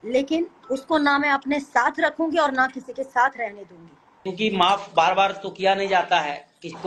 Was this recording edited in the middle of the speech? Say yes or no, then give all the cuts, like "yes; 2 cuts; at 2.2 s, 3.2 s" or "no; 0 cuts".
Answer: yes; 1 cut; at 4.3 s